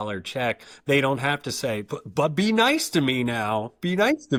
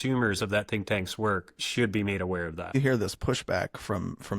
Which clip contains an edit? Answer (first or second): second